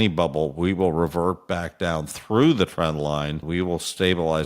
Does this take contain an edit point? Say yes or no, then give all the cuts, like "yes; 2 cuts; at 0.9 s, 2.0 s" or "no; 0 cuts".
yes; 1 cut; at 3.4 s